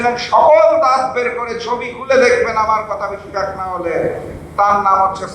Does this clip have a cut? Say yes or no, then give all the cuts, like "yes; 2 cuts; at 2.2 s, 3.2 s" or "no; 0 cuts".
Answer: no; 0 cuts